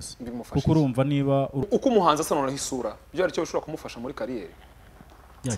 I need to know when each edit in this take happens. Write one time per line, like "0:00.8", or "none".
0:01.6